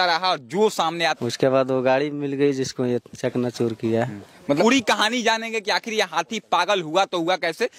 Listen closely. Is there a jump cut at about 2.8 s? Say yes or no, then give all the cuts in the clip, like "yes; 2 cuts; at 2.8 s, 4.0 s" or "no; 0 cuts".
no; 2 cuts; at 1.2 s, 4.4 s